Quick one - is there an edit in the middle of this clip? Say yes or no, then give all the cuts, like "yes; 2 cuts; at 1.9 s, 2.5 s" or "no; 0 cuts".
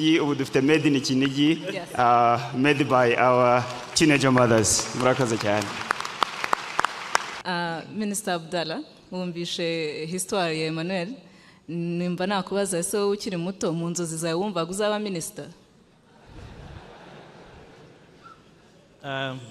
yes; 1 cut; at 7.3 s